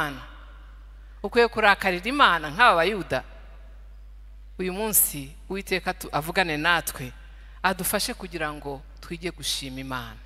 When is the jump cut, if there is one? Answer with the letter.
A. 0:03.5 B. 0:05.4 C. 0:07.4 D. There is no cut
D